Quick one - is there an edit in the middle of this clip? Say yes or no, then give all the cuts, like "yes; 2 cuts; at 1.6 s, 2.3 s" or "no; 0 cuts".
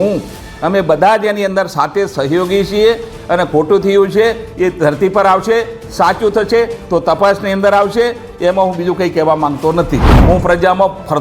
yes; 1 cut; at 10.1 s